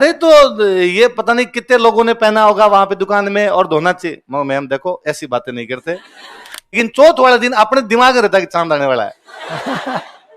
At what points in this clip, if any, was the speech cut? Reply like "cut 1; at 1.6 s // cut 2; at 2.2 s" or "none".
cut 1; at 6.6 s